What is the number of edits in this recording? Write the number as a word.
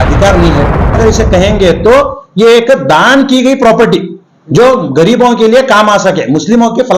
one